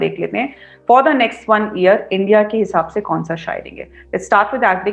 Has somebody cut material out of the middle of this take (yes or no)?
no